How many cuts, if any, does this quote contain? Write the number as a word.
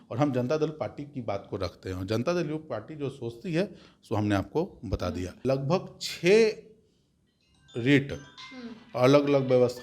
one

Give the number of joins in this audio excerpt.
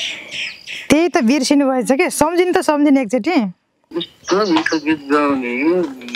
zero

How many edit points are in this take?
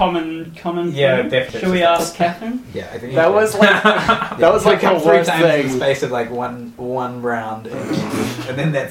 one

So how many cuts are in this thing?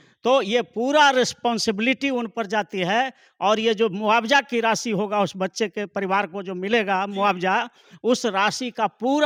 zero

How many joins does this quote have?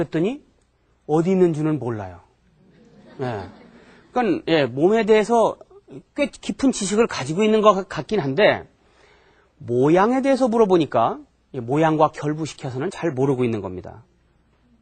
one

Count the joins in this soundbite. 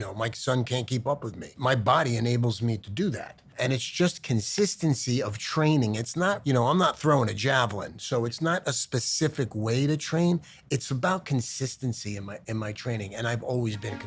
two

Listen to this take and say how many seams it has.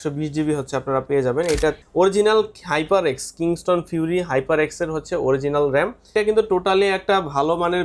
two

